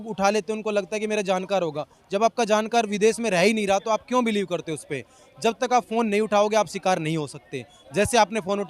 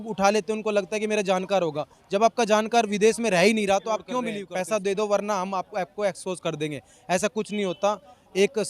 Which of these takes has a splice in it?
second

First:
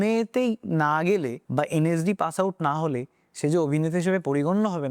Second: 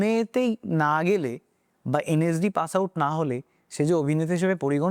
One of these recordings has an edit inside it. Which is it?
first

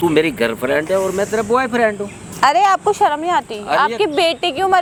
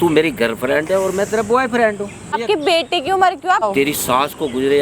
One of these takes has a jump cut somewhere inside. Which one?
second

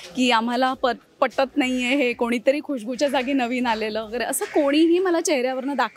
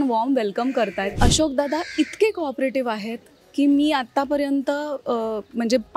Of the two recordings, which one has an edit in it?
second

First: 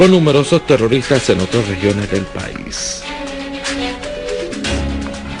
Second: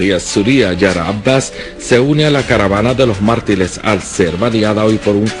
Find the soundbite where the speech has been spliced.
first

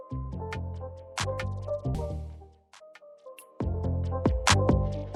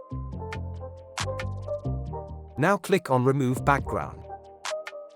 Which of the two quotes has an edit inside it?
second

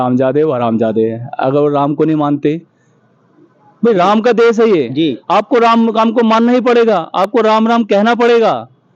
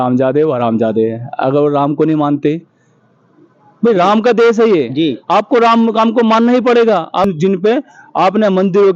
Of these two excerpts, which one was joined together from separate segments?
second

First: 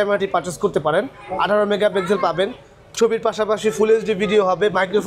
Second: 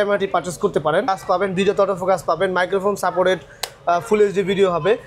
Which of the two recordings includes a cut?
second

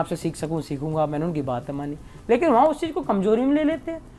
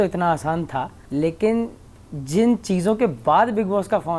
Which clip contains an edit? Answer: second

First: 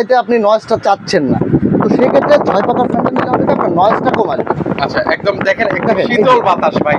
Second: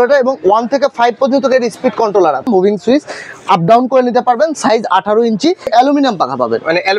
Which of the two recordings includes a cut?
second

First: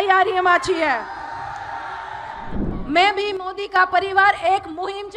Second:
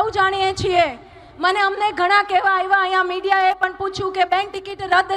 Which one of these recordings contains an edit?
first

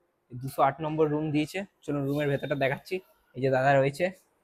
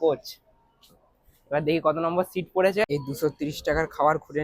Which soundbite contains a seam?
second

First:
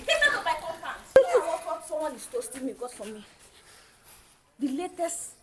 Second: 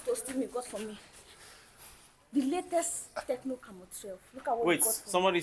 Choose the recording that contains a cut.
first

